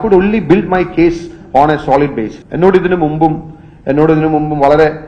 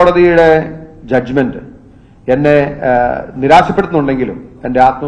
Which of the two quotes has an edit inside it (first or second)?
first